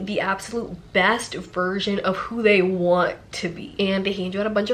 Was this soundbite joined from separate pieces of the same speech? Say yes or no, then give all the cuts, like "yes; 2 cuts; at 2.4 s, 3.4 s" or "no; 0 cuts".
yes; 1 cut; at 3.6 s